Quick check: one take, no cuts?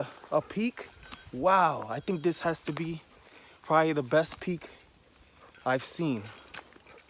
yes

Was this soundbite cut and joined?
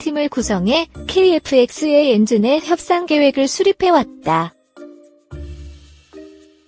yes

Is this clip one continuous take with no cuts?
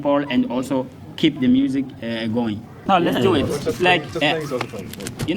yes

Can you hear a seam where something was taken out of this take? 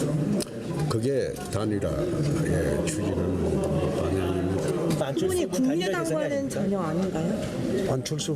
yes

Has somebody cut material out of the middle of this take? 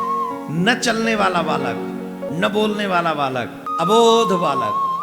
yes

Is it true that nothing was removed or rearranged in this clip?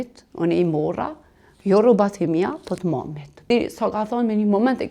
no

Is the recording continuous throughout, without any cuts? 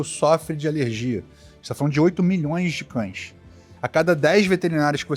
yes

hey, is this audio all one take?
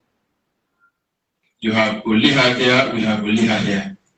yes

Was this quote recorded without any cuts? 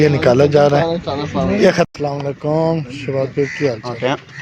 no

